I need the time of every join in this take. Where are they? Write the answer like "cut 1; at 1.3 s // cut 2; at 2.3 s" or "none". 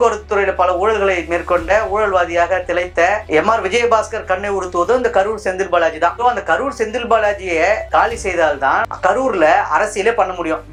none